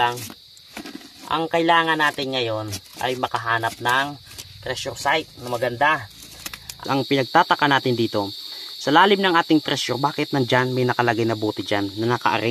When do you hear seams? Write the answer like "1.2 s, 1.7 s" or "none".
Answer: 6.7 s